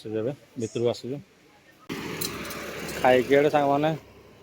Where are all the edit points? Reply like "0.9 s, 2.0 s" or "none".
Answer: 1.9 s